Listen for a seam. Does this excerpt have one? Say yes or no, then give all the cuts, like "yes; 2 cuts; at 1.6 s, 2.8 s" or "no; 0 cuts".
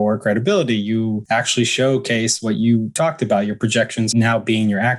yes; 3 cuts; at 1.2 s, 2.9 s, 4.1 s